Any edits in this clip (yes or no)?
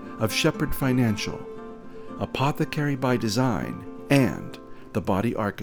no